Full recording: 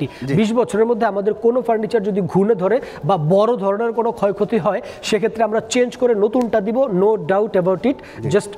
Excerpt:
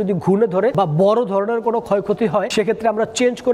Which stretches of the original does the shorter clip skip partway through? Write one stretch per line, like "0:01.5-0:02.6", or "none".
0:02.8-0:03.0
0:04.8-0:05.0